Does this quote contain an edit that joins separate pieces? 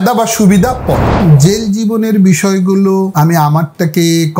yes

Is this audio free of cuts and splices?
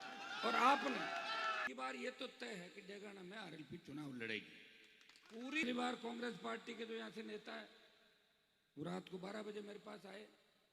no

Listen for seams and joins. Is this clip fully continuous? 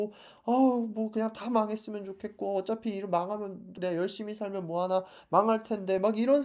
yes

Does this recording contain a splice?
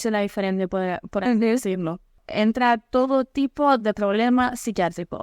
no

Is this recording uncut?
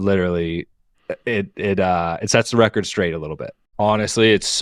no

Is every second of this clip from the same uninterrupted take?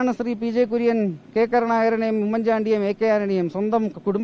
yes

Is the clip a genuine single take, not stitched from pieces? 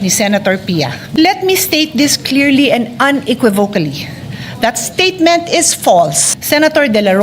no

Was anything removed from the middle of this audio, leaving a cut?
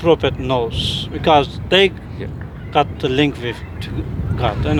no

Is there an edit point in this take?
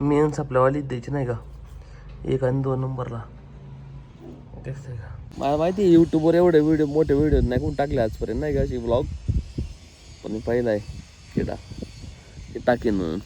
yes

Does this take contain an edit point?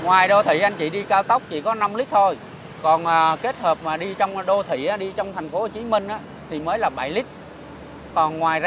no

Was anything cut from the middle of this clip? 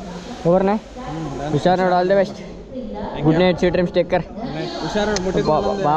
no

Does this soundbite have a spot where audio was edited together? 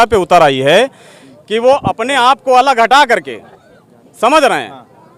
no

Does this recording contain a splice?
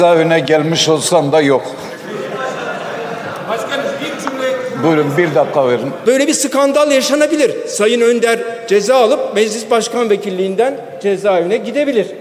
yes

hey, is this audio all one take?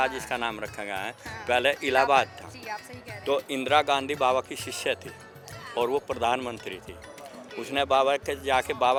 yes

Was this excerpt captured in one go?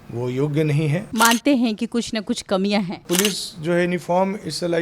no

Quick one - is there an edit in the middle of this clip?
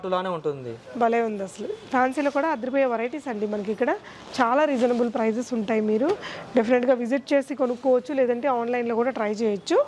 no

